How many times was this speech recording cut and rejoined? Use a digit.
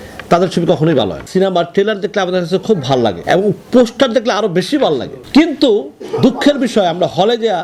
3